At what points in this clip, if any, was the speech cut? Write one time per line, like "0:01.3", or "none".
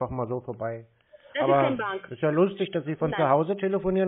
none